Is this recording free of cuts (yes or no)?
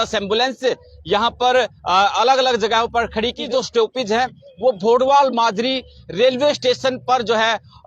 no